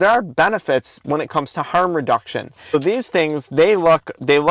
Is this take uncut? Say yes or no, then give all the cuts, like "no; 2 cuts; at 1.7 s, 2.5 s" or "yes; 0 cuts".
no; 1 cut; at 2.7 s